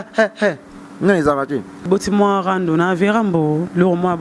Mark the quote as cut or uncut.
cut